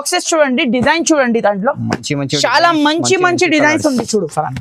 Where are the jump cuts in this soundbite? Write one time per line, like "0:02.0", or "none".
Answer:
none